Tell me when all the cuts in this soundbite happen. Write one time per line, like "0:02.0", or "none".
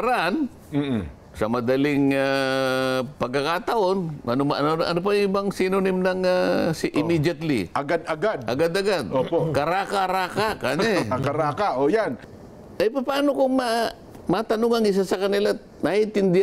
0:12.2